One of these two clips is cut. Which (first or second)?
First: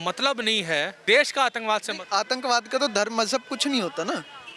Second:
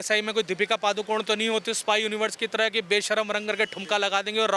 first